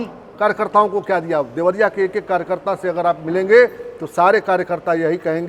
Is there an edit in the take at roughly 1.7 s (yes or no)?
no